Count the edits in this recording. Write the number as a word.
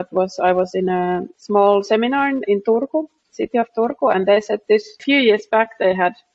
two